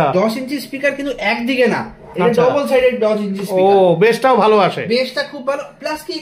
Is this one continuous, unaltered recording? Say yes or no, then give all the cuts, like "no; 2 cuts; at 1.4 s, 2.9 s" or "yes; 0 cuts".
yes; 0 cuts